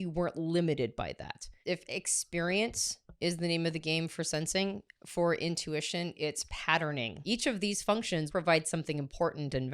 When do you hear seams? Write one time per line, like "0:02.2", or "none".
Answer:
0:01.6
0:07.2
0:08.3